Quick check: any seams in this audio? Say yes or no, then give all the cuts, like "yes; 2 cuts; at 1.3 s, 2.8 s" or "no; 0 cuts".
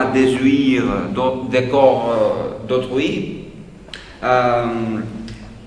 no; 0 cuts